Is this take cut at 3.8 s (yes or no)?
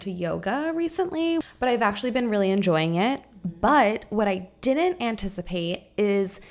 no